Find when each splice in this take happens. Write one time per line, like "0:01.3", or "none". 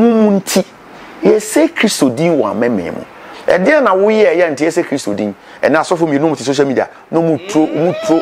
none